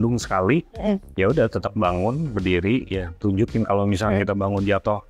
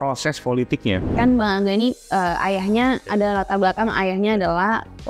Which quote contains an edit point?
second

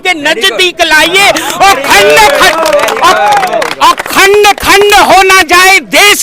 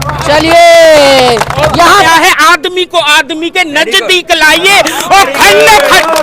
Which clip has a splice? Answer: second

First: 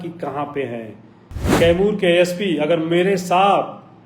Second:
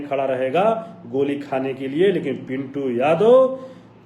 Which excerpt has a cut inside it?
first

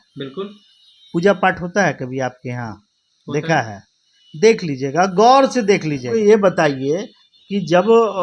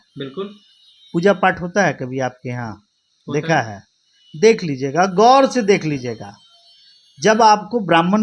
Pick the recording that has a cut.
first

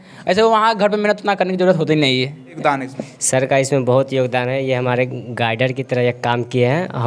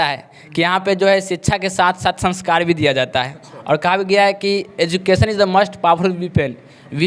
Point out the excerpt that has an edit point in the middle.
first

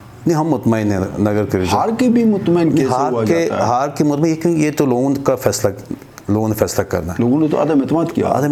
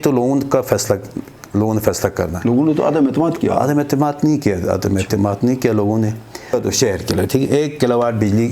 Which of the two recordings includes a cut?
second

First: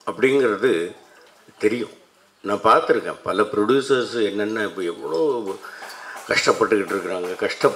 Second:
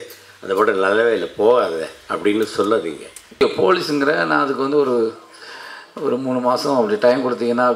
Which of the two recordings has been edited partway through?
second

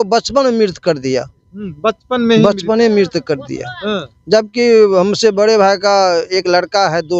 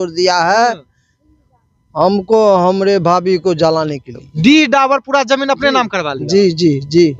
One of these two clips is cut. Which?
second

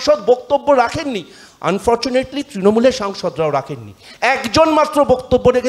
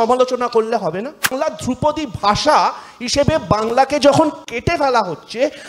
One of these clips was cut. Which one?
second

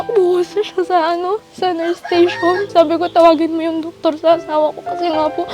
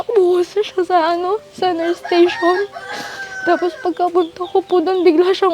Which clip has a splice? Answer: first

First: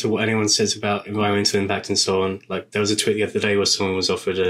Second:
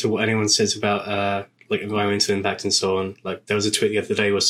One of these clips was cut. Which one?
first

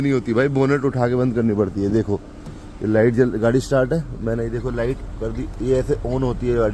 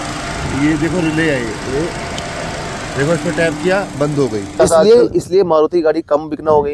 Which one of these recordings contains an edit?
second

